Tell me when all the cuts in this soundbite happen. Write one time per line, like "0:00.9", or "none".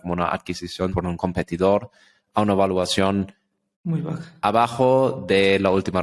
0:01.0